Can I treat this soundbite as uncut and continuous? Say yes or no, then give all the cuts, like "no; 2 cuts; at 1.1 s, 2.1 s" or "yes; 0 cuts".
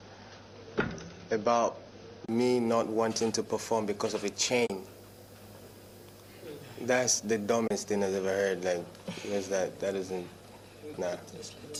yes; 0 cuts